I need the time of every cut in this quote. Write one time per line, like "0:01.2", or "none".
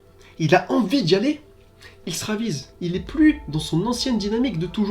0:02.7